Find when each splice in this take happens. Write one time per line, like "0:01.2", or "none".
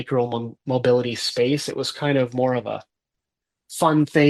none